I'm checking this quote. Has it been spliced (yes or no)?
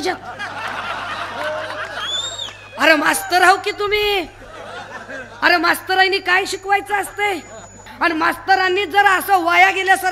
yes